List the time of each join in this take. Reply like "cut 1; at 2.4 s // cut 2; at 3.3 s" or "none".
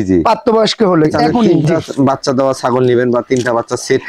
cut 1; at 1.5 s